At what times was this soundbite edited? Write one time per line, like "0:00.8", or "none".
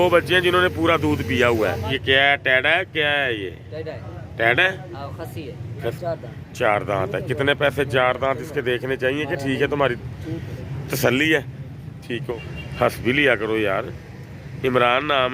0:01.9
0:05.9
0:12.3